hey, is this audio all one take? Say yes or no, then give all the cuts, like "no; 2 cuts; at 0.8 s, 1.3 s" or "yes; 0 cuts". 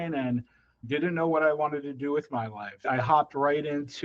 no; 2 cuts; at 0.8 s, 2.8 s